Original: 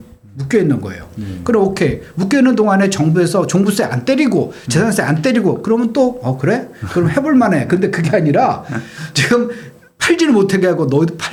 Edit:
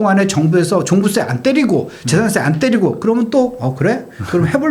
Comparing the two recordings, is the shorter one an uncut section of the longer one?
yes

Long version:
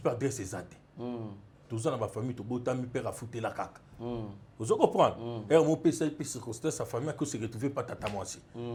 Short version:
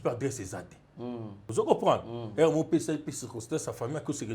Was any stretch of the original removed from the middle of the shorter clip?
yes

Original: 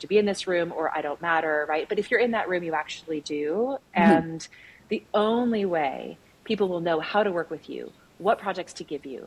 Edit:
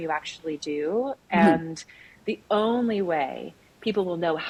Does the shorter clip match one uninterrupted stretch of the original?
yes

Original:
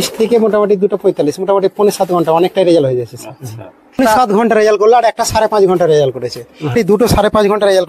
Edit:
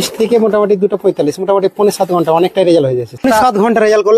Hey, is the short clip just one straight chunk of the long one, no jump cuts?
no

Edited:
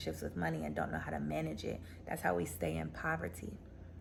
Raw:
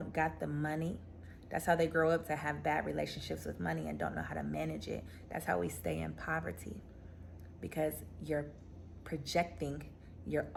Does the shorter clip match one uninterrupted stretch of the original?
yes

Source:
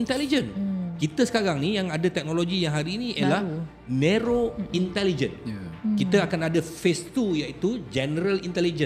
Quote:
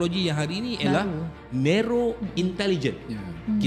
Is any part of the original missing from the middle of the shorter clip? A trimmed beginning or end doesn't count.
no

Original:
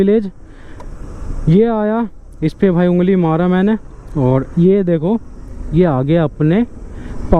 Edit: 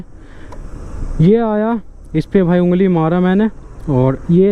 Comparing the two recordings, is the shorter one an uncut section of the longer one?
yes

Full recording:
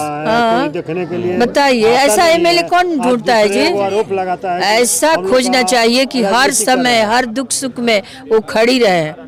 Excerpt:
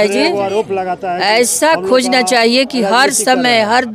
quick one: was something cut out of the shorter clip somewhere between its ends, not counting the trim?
no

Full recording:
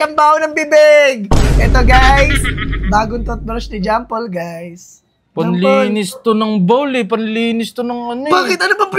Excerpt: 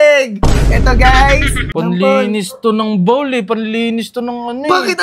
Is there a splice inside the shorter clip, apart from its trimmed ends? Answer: yes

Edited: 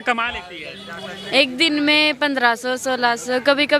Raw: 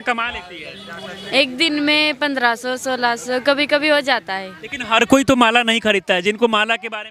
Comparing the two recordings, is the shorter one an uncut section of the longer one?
yes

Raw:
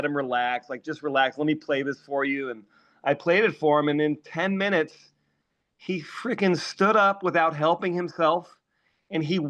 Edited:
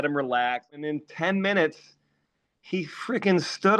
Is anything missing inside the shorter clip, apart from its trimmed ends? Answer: yes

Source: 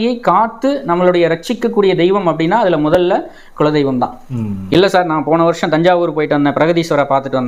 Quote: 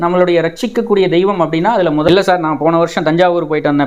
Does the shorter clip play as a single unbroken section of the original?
no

